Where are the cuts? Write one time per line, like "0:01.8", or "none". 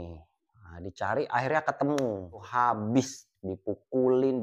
0:02.4